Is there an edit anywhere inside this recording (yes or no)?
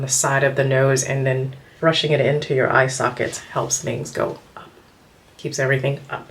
yes